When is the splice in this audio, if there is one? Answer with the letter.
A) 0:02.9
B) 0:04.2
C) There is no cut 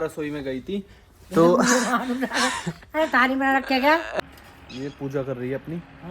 B